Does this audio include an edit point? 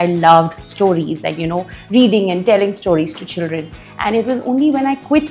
no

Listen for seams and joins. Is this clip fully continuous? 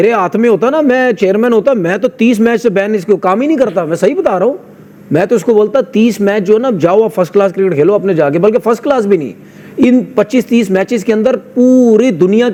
yes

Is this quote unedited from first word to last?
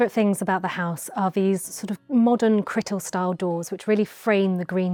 yes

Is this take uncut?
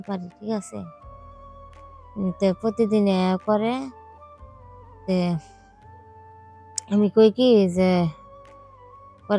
yes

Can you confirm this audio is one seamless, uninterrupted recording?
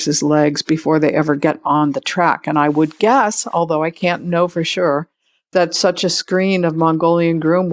yes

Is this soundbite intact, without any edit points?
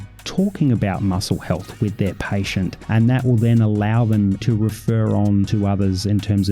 no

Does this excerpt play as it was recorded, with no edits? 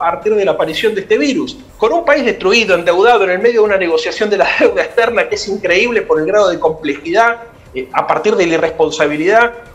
no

